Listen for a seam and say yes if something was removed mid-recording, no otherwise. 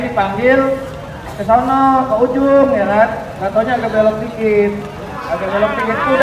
no